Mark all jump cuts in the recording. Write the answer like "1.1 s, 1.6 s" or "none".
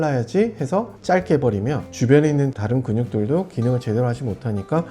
0.9 s, 1.9 s